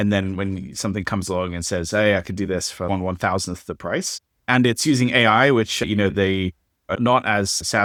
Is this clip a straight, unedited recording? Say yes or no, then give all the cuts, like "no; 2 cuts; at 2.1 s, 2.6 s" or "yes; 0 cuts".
yes; 0 cuts